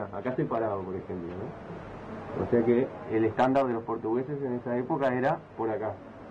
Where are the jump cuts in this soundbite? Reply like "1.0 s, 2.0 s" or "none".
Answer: none